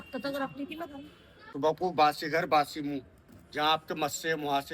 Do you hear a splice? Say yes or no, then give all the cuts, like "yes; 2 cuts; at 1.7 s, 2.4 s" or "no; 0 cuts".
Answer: yes; 1 cut; at 1.4 s